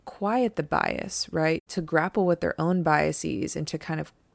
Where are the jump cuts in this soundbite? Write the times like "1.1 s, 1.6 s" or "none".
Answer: 1.7 s